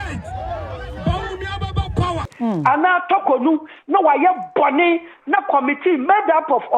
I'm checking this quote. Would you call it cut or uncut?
cut